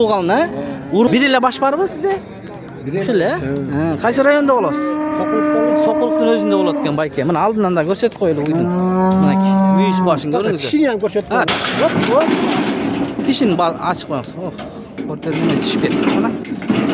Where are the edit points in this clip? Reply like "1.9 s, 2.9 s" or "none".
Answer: 1.1 s